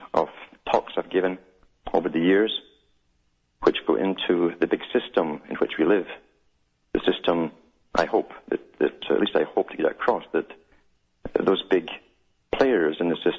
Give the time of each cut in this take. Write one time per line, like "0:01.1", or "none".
none